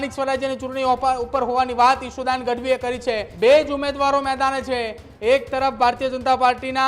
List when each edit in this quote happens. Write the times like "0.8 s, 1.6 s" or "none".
3.3 s

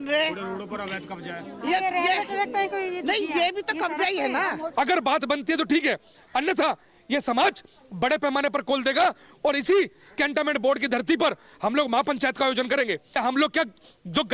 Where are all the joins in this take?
4.6 s, 13.1 s

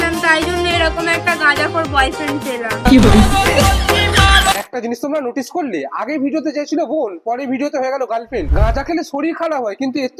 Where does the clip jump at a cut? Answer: none

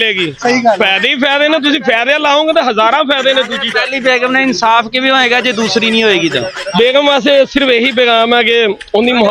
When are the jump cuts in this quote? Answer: 6.6 s

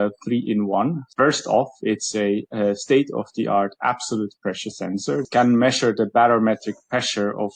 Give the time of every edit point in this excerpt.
1.1 s, 5.3 s

